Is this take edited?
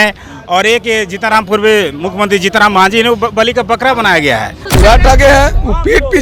yes; 1 cut; at 4.6 s

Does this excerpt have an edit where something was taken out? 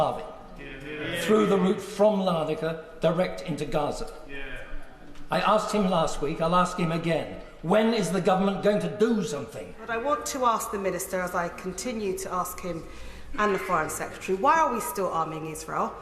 yes; 1 cut; at 9.8 s

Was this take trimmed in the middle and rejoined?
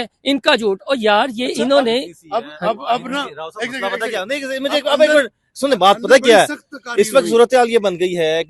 no; 0 cuts

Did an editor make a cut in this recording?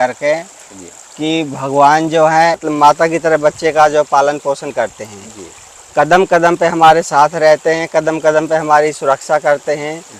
yes; 1 cut; at 2.6 s

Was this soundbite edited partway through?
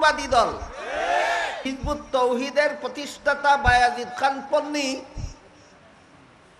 yes; 1 cut; at 1.7 s

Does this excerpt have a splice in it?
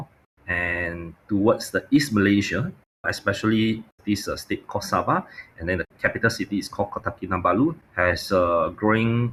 no; 0 cuts

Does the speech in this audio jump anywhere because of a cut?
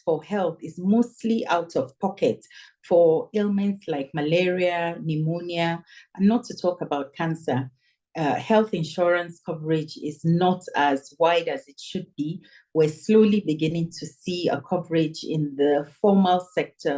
no; 0 cuts

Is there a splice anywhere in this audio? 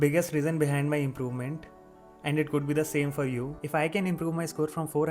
yes; 1 cut; at 3.6 s

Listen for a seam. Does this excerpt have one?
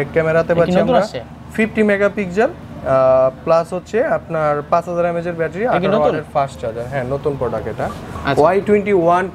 no; 0 cuts

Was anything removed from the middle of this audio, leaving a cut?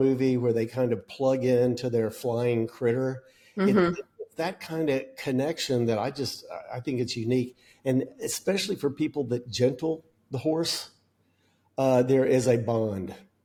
no; 0 cuts

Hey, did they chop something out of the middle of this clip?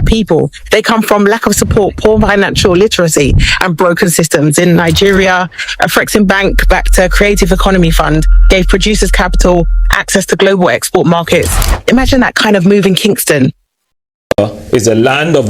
yes; 1 cut; at 13.9 s

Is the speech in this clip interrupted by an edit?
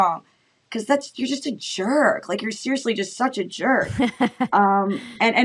no; 0 cuts

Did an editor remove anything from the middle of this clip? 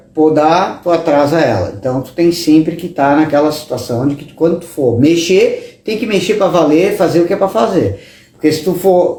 no; 0 cuts

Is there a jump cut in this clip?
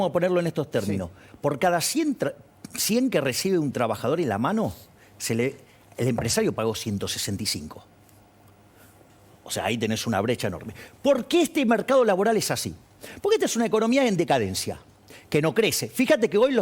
no; 0 cuts

